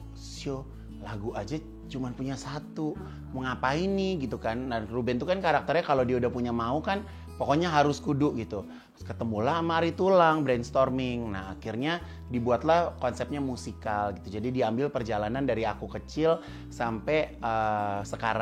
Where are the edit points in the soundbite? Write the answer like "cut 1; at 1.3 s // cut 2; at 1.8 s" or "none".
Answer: none